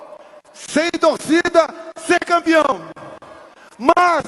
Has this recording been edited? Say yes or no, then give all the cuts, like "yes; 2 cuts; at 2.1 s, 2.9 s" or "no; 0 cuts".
no; 0 cuts